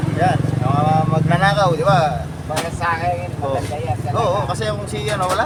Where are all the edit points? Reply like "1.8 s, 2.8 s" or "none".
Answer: none